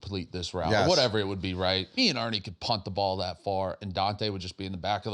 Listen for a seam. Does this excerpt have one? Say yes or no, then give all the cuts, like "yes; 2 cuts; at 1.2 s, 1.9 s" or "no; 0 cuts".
yes; 1 cut; at 1.9 s